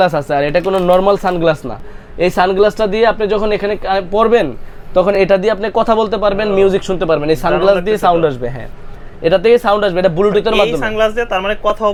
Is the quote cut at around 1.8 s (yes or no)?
no